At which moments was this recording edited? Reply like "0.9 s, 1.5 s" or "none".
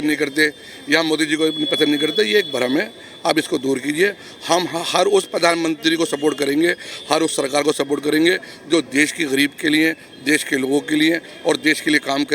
none